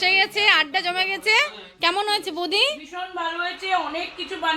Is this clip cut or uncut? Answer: uncut